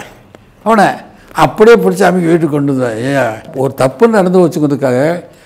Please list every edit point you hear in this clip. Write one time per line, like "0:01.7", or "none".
0:03.5